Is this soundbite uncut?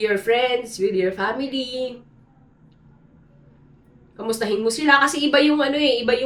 yes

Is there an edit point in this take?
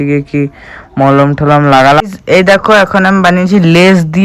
yes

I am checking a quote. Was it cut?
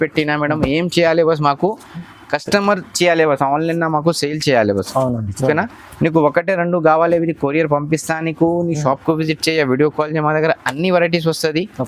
no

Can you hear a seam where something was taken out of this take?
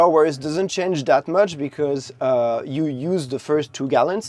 no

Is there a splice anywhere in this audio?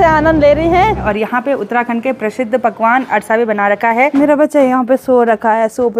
yes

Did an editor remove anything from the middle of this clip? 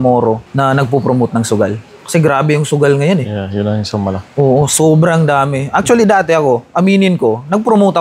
no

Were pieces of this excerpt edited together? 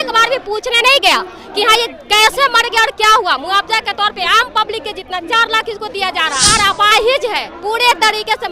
yes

